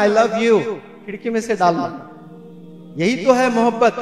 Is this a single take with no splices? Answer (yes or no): yes